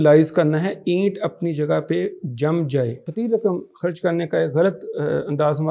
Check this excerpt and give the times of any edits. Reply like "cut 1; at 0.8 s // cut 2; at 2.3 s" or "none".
cut 1; at 3.0 s